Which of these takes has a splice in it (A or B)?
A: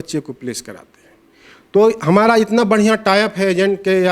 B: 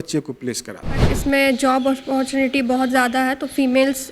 B